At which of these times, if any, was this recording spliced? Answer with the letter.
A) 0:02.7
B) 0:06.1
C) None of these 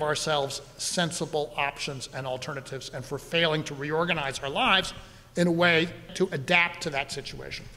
B